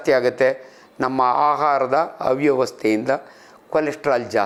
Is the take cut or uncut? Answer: uncut